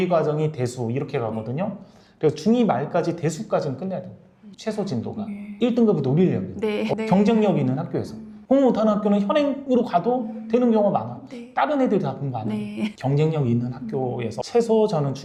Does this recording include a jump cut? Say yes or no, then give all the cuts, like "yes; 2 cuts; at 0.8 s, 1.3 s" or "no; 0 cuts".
no; 0 cuts